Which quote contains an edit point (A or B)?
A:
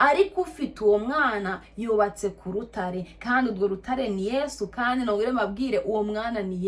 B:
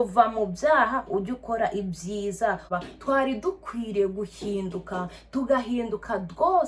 B